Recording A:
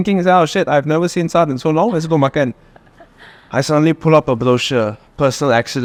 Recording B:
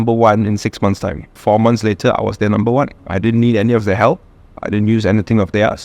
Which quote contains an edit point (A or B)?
B